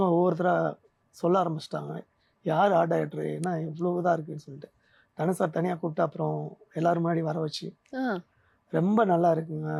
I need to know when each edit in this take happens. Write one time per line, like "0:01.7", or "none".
none